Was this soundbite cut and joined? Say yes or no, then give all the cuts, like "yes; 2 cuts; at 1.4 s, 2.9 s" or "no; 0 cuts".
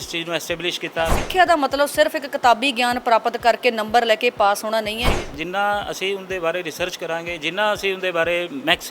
yes; 2 cuts; at 1.2 s, 5.1 s